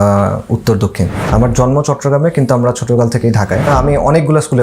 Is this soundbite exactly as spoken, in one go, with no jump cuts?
no; 2 cuts; at 1.2 s, 3.7 s

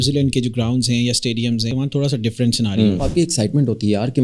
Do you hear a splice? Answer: yes; 2 cuts; at 1.7 s, 3.1 s

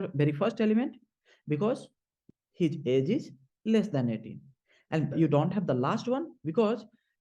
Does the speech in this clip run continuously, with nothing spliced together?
no; 1 cut; at 5.1 s

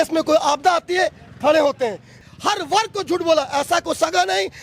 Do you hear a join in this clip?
yes; 1 cut; at 2.2 s

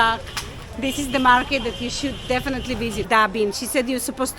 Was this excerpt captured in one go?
no; 1 cut; at 3.0 s

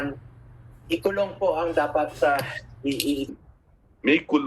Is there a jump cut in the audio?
yes; 1 cut; at 3.3 s

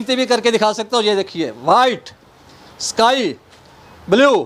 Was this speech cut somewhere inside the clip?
no; 0 cuts

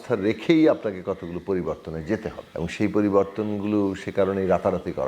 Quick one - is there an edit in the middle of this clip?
yes; 1 cut; at 2.4 s

